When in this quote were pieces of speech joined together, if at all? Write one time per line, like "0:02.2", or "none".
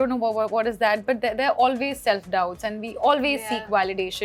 none